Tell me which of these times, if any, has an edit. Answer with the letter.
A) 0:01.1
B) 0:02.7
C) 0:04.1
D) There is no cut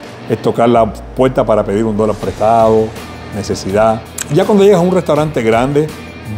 C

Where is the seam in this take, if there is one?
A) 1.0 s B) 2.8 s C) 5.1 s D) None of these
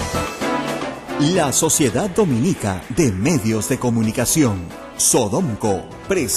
A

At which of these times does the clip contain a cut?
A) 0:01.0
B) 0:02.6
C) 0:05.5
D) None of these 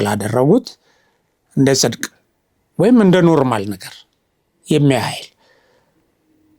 D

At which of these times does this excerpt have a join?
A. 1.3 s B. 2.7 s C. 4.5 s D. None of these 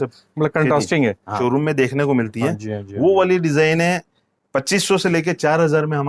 A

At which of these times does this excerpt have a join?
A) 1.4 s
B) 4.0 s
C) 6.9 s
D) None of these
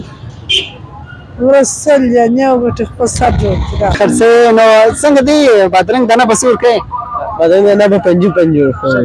B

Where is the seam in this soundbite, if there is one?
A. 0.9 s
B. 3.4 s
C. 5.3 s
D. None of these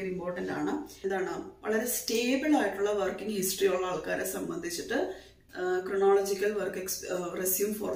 A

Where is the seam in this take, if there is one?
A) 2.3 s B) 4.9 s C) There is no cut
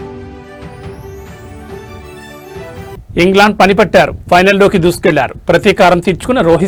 C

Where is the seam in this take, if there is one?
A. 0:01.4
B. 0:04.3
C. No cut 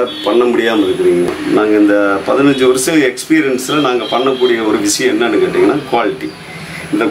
A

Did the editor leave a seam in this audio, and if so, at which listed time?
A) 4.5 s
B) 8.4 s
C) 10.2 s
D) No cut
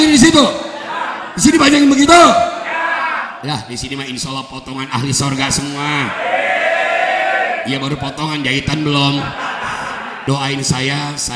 C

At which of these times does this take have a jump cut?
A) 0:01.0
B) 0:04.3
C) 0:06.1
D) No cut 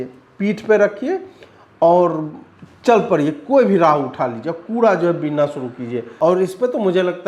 C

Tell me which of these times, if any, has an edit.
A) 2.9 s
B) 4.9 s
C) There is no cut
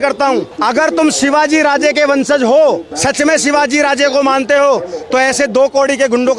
A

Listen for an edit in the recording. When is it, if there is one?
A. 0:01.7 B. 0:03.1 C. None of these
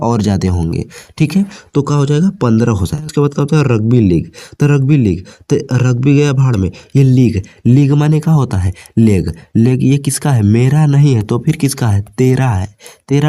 B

